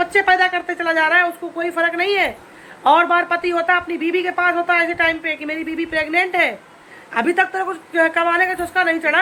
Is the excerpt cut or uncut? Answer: uncut